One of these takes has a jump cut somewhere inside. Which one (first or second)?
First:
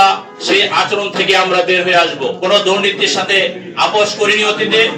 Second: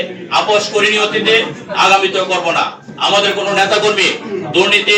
first